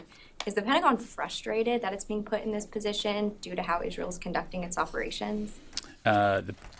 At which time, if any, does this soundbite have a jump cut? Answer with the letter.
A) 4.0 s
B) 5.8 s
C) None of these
A